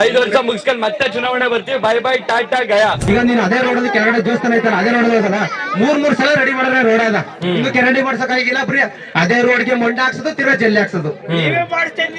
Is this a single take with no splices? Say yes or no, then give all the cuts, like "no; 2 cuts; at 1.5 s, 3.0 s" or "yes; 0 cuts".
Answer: no; 1 cut; at 3.1 s